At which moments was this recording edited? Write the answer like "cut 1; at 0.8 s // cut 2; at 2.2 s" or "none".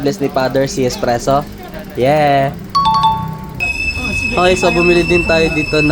cut 1; at 3.6 s

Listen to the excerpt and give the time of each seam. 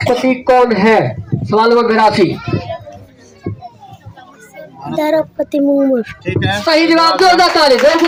none

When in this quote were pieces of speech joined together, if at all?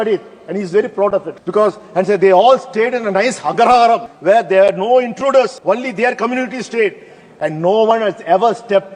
cut 1; at 1.4 s // cut 2; at 4.1 s // cut 3; at 5.6 s

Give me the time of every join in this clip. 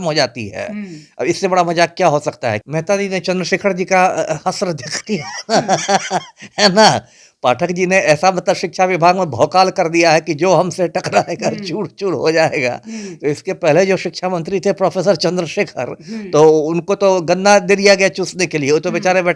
cut 1; at 2.7 s

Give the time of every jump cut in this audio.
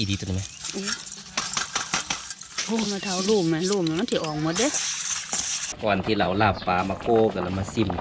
cut 1; at 1.1 s // cut 2; at 5.6 s

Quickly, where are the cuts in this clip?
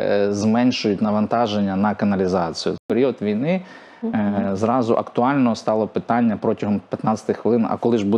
cut 1; at 2.9 s

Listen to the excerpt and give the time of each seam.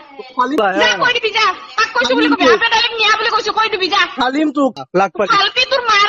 cut 1; at 4.7 s

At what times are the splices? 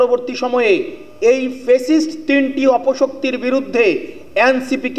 none

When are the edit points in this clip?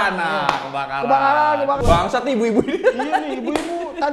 cut 1; at 1.8 s

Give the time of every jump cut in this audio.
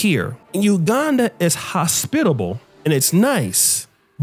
none

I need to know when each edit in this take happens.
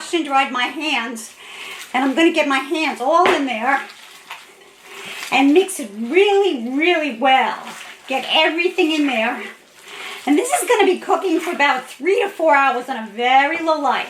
none

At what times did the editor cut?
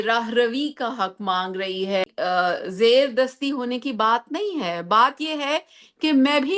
cut 1; at 2.0 s

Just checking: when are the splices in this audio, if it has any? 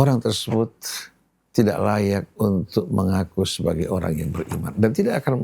none

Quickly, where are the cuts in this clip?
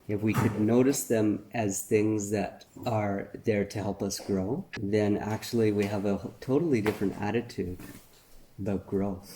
cut 1; at 2.6 s // cut 2; at 4.7 s

